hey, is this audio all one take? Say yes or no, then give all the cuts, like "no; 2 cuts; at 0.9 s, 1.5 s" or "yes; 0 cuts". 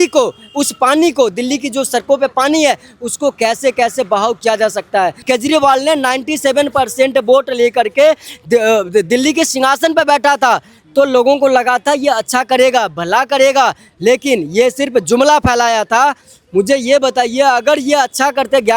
no; 1 cut; at 5.2 s